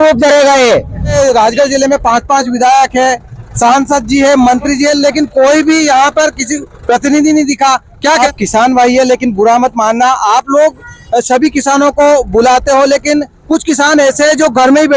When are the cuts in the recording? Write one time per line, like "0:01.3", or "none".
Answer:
0:01.1
0:08.2